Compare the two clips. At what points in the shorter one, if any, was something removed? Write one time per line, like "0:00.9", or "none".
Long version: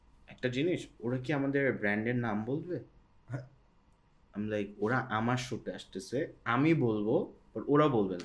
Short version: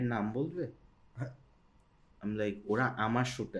none

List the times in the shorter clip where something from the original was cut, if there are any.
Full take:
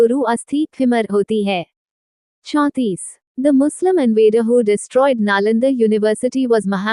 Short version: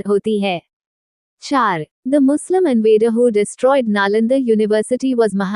0:01.5

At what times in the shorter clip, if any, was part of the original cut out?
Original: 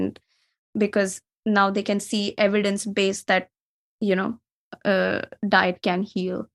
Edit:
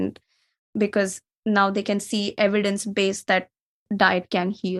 0:03.8

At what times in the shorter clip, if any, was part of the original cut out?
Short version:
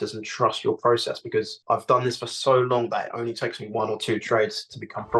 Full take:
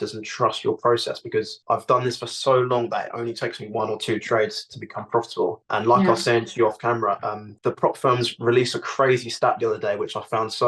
none

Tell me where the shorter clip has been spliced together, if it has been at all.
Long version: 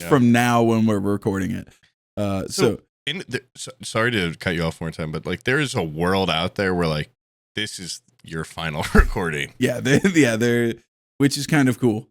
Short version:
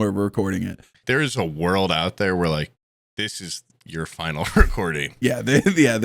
0:00.9

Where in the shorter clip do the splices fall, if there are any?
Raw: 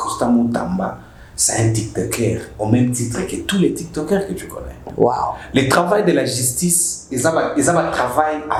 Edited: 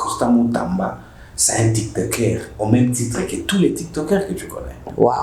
none

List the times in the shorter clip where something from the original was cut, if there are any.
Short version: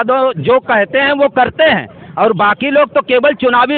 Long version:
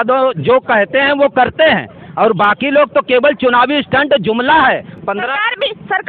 none

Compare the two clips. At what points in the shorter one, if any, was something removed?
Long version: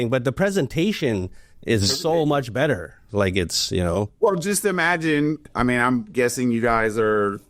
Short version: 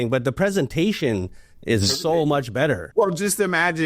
0:02.9

